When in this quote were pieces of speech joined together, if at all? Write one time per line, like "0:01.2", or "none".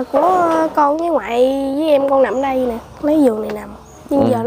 none